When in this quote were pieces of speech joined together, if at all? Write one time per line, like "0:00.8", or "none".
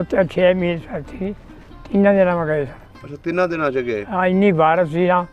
none